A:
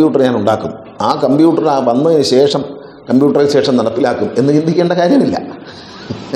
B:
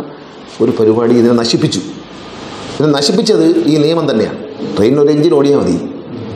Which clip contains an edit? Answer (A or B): B